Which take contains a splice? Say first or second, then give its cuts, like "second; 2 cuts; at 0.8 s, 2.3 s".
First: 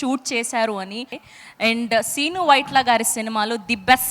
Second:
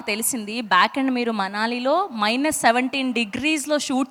first; 1 cut; at 1.2 s